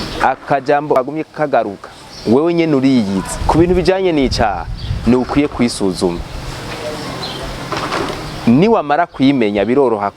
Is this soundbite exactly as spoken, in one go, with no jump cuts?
no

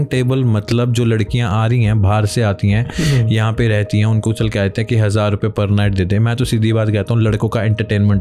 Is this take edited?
no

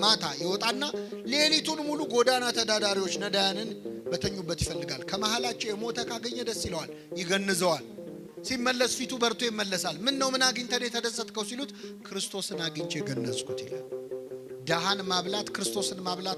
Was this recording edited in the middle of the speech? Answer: no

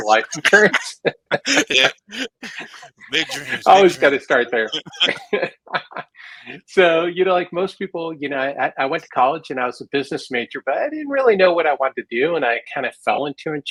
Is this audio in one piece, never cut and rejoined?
yes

